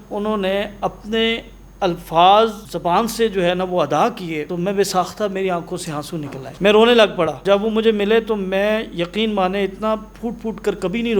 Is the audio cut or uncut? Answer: cut